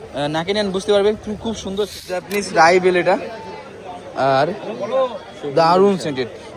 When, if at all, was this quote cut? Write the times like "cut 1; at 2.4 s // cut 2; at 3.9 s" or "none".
cut 1; at 2.3 s